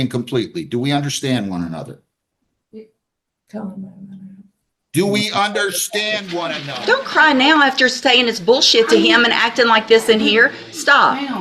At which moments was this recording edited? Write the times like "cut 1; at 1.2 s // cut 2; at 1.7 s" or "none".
cut 1; at 6.6 s

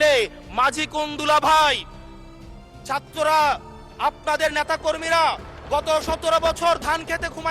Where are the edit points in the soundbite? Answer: none

